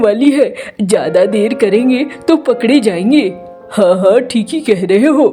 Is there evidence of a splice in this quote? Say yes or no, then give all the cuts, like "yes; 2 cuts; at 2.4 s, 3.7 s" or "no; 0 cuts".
no; 0 cuts